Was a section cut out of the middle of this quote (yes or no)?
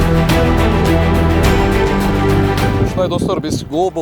yes